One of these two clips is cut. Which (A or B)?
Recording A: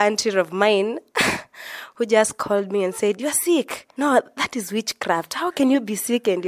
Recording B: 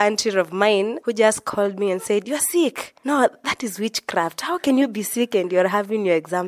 B